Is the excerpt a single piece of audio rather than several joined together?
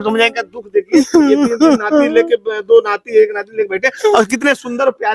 yes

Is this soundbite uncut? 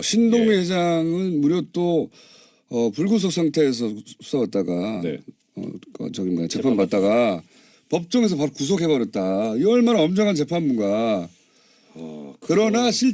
no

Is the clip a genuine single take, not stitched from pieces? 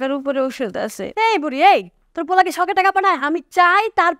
no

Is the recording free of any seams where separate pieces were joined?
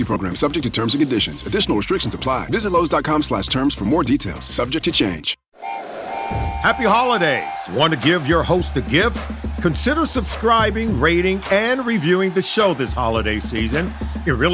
no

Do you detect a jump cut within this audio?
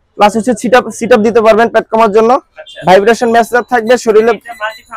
no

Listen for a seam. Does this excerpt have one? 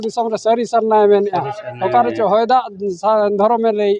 no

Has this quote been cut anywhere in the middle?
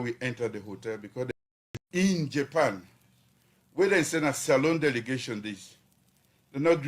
yes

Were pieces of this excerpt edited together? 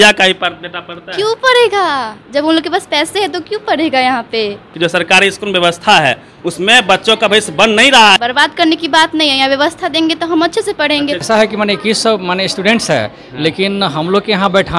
yes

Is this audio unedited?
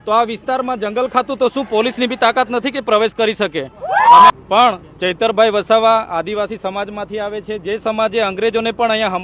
no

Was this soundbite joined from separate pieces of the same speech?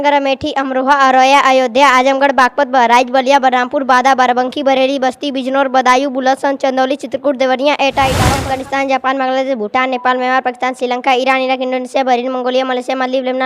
yes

